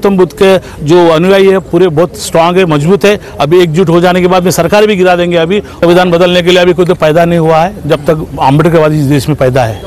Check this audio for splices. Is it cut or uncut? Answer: cut